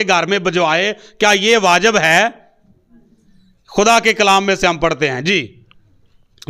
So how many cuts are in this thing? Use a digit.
0